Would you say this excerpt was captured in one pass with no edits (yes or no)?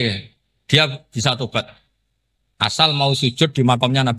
yes